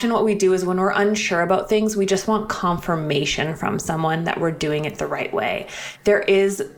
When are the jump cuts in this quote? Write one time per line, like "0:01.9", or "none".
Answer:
0:05.8